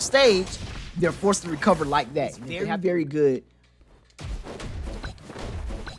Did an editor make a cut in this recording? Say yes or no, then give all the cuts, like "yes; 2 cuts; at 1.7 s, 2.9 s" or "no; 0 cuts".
yes; 1 cut; at 2.5 s